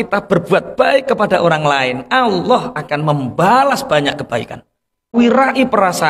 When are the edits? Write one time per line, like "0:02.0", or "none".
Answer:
0:05.1